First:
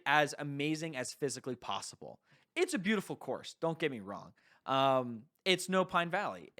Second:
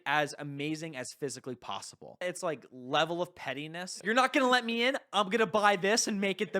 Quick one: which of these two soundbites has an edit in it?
second; 2 cuts; at 2.2 s, 3.9 s

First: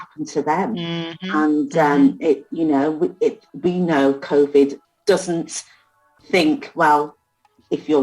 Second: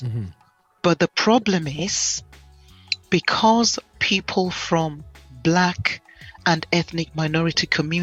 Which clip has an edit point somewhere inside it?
first; 1 cut; at 4.9 s

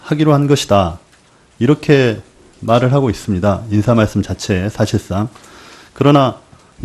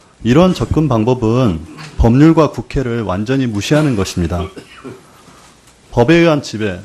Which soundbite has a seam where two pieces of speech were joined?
second; 1 cut; at 1.7 s

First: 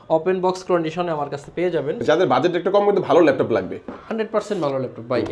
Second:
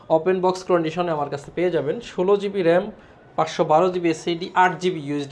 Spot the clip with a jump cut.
first; 1 cut; at 2.0 s

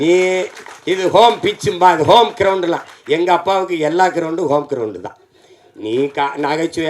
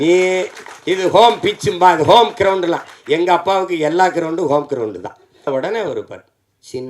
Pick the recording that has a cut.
second; 1 cut; at 5.5 s

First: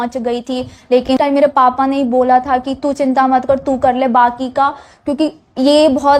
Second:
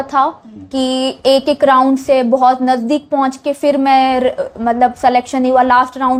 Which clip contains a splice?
first; 1 cut; at 1.1 s

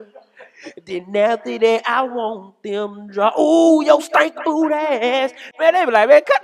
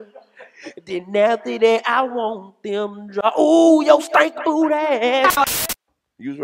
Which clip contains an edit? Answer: second; 1 cut; at 5.5 s

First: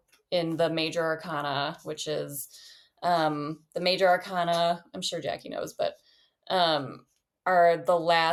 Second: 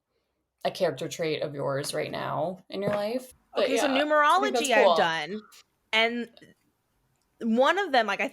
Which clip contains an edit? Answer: second; 1 cut; at 3.4 s

